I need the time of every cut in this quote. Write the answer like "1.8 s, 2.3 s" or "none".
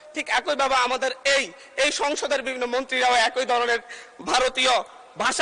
none